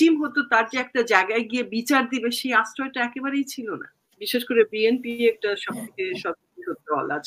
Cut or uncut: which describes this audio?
cut